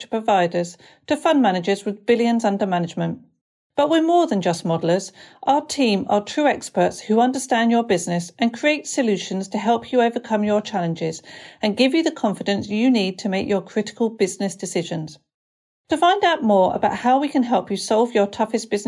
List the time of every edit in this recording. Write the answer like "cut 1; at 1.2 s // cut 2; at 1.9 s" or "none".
none